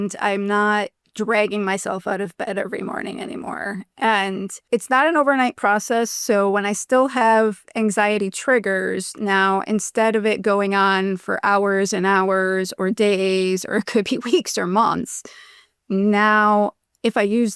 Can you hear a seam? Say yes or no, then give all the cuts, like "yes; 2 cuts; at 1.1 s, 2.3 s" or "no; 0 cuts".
yes; 2 cuts; at 1.0 s, 4.5 s